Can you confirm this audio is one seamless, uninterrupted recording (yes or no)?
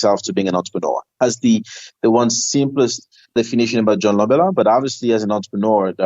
no